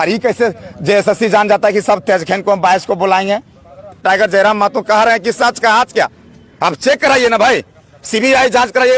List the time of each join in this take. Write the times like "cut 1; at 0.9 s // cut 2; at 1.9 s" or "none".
cut 1; at 4.0 s